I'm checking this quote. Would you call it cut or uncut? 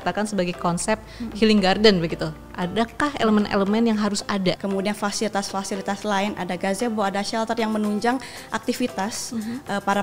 cut